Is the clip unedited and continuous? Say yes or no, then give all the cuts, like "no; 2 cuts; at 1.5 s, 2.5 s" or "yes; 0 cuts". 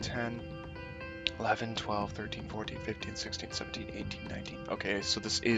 yes; 0 cuts